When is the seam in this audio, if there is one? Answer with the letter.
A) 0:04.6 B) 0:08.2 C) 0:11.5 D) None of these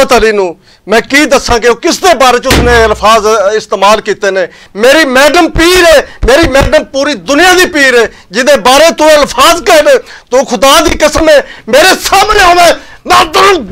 A